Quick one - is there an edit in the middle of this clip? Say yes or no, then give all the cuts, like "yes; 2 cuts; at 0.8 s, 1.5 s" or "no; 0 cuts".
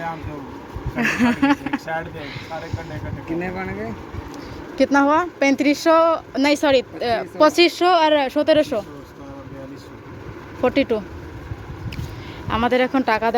no; 0 cuts